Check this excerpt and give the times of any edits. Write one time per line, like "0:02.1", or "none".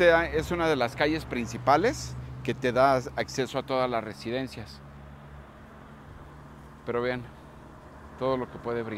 none